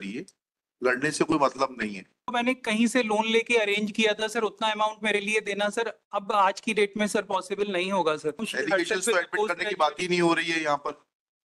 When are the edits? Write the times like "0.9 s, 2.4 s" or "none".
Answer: 2.3 s, 8.5 s